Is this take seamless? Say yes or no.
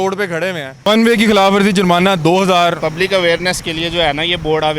no